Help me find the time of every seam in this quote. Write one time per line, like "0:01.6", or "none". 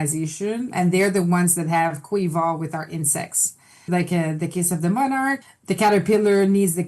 0:03.9
0:05.4